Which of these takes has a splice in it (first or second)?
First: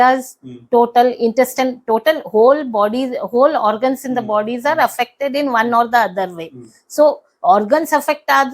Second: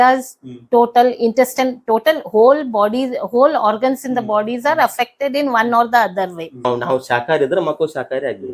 second